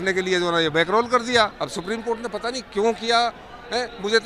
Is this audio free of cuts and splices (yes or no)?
no